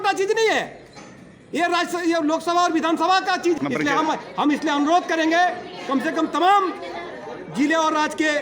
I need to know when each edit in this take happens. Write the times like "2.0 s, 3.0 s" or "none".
3.6 s